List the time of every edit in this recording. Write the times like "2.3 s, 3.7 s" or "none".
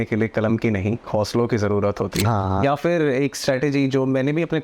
2.2 s

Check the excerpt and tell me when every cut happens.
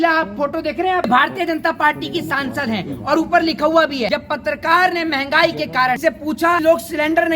1.1 s, 4.1 s, 6.6 s

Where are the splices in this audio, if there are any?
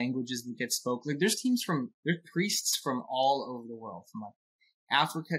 none

